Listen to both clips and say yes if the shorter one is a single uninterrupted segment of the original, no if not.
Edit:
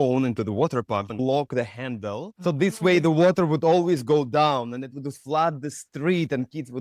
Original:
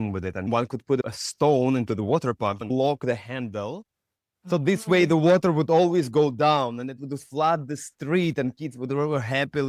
no